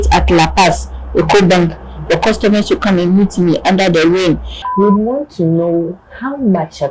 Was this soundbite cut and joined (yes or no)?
yes